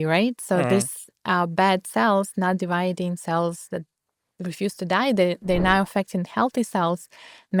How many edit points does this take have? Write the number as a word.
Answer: zero